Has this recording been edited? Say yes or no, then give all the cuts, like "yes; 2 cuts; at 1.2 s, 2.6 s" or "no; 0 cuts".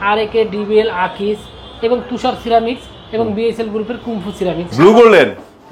yes; 1 cut; at 4.7 s